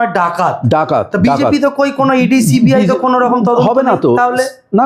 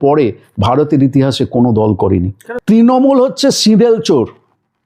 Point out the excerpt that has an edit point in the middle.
second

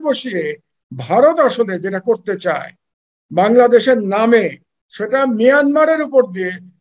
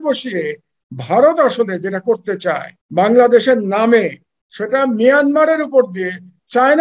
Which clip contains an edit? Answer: second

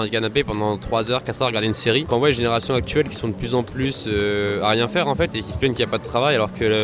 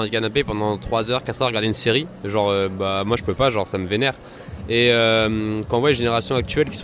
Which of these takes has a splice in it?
first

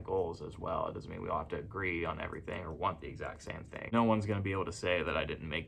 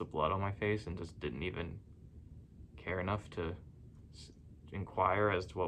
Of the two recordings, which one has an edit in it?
first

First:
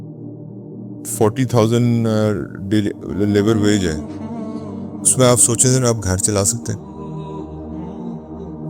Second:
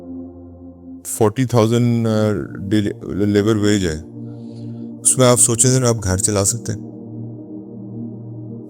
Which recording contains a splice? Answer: first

